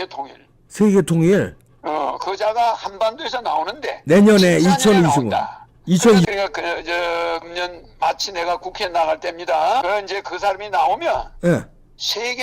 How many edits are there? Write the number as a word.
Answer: three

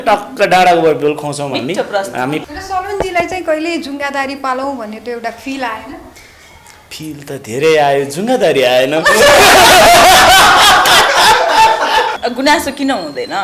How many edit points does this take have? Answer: two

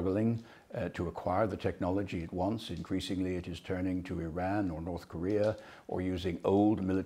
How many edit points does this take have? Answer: zero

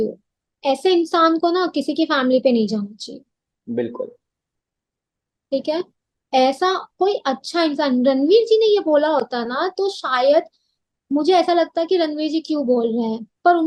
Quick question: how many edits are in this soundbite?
zero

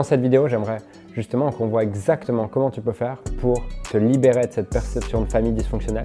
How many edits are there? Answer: zero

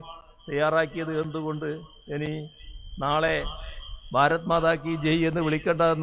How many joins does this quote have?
zero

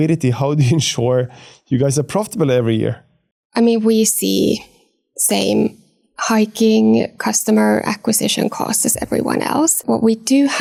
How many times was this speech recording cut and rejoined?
zero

